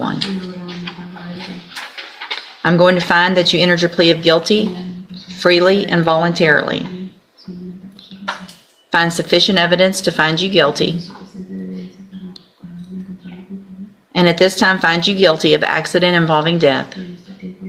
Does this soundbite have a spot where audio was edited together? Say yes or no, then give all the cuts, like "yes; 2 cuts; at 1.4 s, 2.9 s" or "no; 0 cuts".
no; 0 cuts